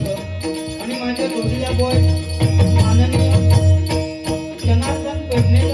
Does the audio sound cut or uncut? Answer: uncut